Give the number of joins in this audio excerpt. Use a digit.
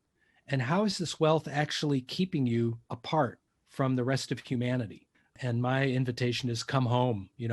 2